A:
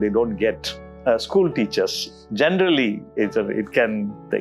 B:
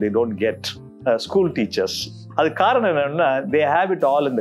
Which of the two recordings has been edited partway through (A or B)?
B